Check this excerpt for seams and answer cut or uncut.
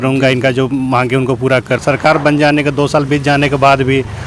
cut